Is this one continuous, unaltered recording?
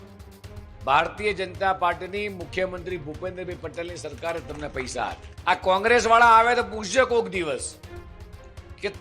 no; 1 cut; at 5.3 s

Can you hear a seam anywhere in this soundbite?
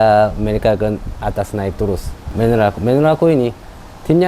yes; 1 cut; at 2.2 s

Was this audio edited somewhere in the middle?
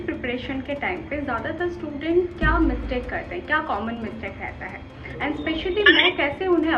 no; 0 cuts

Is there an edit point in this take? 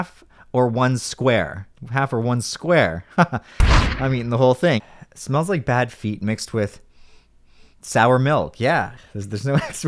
yes; 2 cuts; at 4.8 s, 9.0 s

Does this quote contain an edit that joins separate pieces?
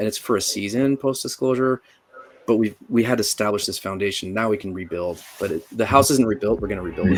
no; 0 cuts

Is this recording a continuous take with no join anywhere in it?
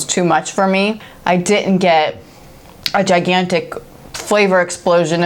no; 1 cut; at 1.1 s

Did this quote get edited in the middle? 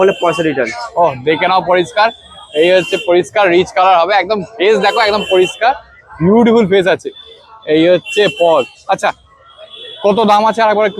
no; 0 cuts

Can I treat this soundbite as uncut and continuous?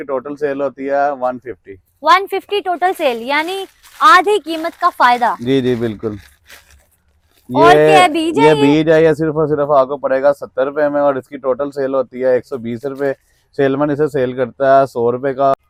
yes; 0 cuts

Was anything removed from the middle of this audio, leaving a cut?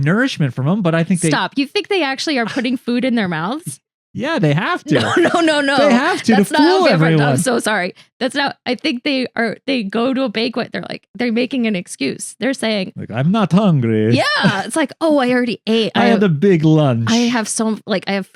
no; 0 cuts

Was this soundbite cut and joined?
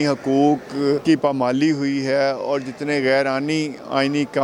yes; 1 cut; at 1.0 s

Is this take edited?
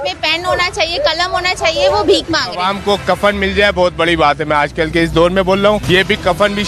yes; 1 cut; at 2.6 s

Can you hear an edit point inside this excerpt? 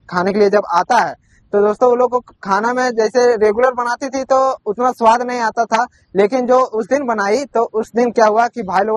no; 0 cuts

